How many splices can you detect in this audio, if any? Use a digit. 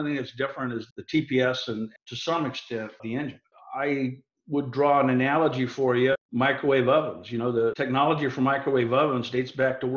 5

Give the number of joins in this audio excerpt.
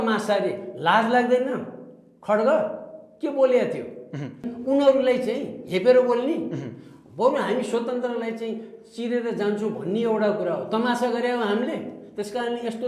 1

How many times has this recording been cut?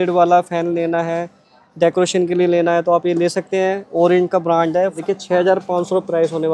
1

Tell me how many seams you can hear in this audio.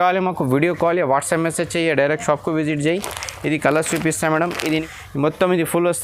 1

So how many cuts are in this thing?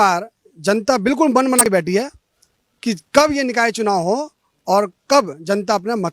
1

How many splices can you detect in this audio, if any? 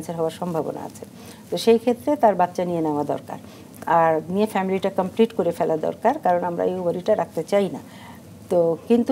0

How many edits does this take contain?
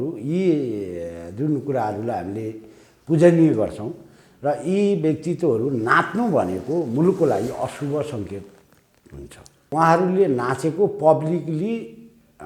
1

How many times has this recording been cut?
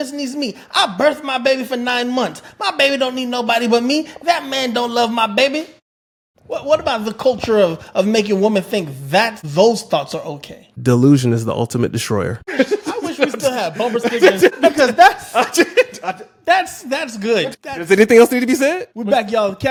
0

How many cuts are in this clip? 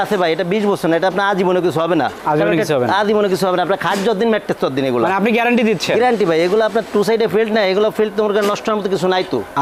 0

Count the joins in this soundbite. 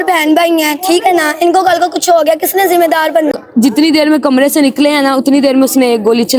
1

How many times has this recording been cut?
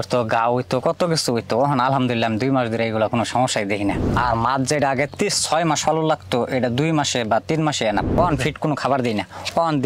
2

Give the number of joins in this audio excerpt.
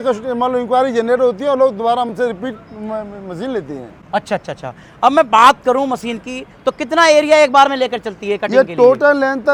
0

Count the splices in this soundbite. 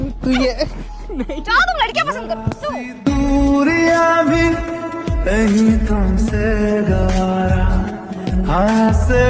0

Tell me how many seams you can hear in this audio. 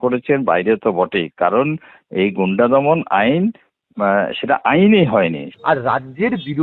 1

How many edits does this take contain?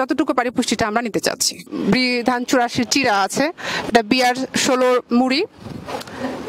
1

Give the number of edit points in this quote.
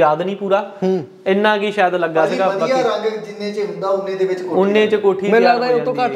0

